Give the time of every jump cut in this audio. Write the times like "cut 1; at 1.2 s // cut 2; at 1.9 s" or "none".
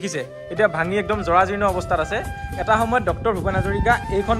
none